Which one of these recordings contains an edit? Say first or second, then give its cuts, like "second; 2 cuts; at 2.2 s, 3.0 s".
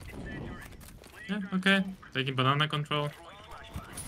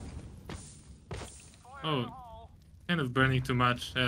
first; 1 cut; at 0.9 s